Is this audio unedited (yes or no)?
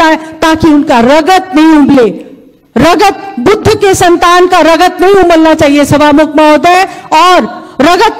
yes